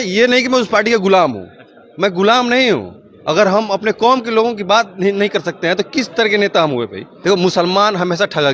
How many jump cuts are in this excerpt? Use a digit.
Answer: 1